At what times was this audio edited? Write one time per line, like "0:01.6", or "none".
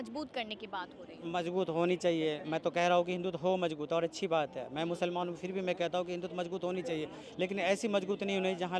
none

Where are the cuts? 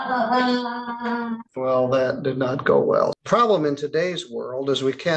0:01.5
0:03.2

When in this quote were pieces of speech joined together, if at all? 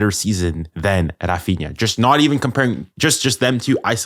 none

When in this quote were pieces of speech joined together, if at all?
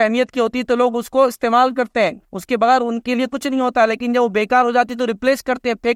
none

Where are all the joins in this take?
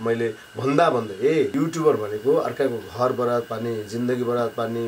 0:01.5

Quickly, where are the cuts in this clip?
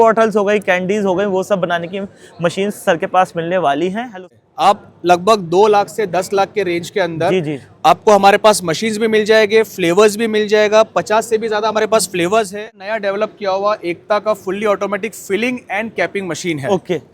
0:04.3
0:12.7

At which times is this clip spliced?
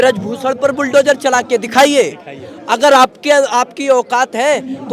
none

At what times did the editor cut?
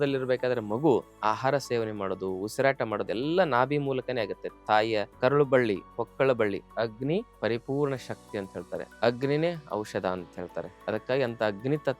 0:05.1
0:06.8
0:08.9
0:10.7

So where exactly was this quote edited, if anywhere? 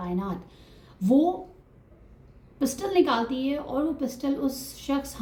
none

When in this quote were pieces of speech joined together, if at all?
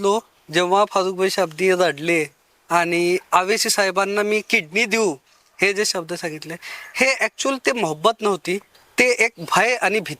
0:08.8

